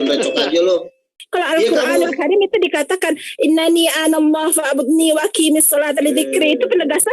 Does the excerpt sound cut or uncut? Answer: cut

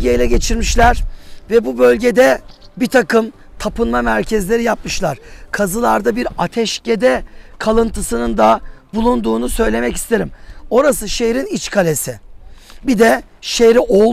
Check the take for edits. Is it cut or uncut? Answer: uncut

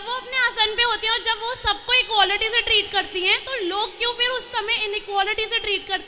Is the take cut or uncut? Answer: uncut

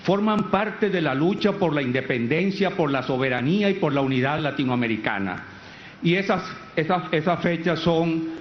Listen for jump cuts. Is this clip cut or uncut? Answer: cut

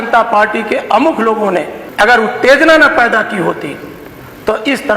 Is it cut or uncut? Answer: cut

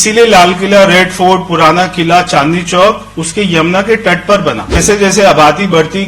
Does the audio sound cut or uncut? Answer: cut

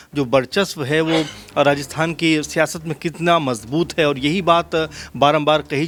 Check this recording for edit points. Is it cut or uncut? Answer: uncut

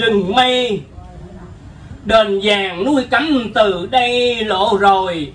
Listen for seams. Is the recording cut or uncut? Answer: uncut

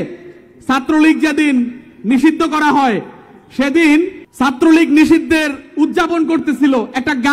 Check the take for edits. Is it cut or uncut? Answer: cut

